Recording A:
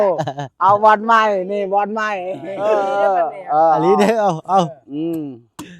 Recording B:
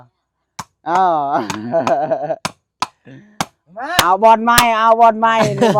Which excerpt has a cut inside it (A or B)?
A